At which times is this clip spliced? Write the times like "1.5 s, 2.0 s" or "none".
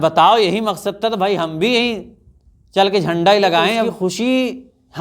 3.9 s

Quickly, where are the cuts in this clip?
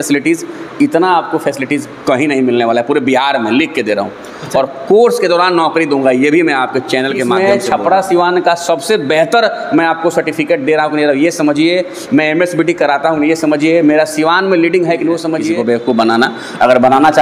7.3 s, 15.6 s

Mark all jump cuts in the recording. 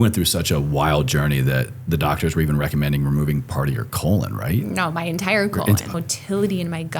5.9 s

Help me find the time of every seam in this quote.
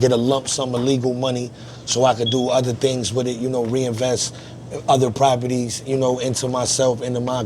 none

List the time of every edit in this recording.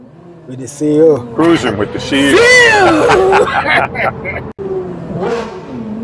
4.5 s

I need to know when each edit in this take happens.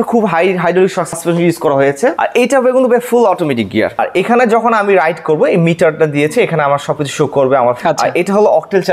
1.1 s, 2.2 s, 4.0 s, 7.8 s

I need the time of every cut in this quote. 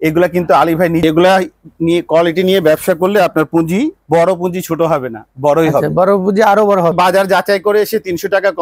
1.0 s, 6.9 s

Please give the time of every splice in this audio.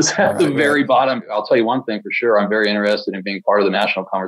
1.3 s

